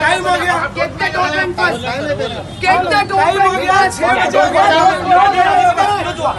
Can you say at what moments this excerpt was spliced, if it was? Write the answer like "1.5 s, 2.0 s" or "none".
none